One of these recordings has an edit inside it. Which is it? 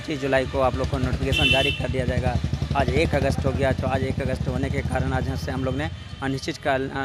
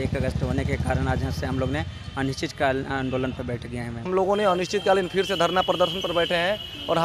second; 1 cut; at 4.1 s

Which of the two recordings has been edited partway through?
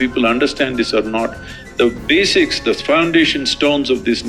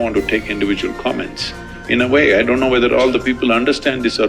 second; 1 cut; at 1.7 s

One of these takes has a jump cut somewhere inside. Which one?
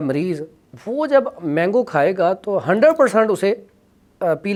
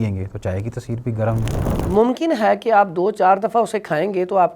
second; 1 cut; at 1.6 s

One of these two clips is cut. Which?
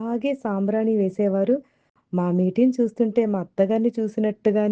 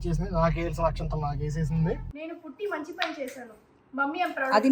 second; 1 cut; at 2.1 s

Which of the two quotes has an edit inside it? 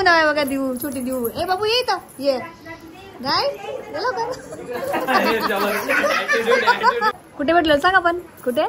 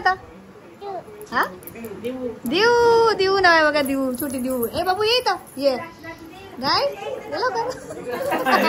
first; 1 cut; at 7.2 s

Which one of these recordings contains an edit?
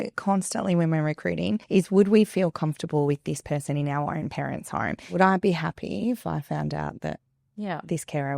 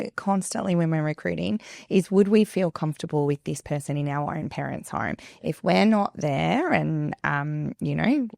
first; 2 cuts; at 1.6 s, 5.1 s

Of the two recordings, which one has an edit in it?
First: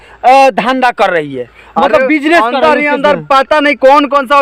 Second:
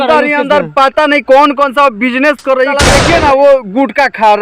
second; 1 cut; at 2.8 s

